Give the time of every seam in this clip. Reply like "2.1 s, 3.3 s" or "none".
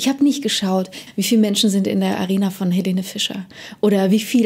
1.0 s